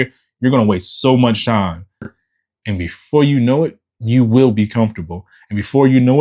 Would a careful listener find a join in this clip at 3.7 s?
no; 1 cut; at 2.2 s

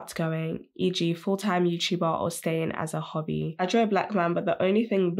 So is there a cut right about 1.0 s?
no; 1 cut; at 3.5 s

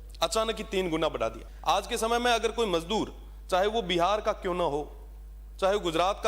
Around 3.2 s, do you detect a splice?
no; 1 cut; at 1.5 s

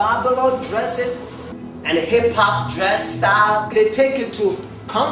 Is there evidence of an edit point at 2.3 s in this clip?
yes; 1 cut; at 2.3 s

